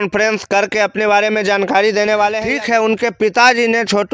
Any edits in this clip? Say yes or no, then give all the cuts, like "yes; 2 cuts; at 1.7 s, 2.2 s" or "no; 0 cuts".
yes; 1 cut; at 2.4 s